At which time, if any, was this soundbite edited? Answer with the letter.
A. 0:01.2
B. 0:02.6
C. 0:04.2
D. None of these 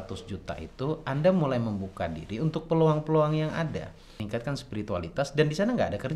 C